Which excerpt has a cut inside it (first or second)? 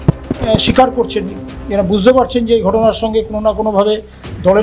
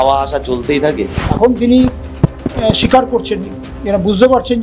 second